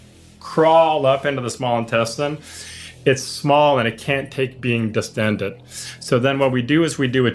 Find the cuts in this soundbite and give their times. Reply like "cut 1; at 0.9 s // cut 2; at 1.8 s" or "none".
none

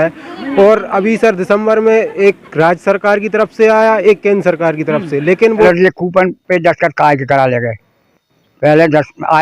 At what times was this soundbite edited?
cut 1; at 5.6 s

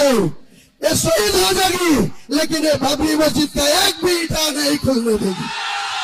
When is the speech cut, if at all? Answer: none

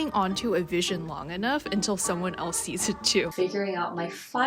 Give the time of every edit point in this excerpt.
cut 1; at 3.3 s

